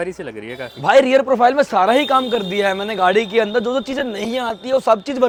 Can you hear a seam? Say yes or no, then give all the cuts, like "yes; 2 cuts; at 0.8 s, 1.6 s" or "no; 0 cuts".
no; 0 cuts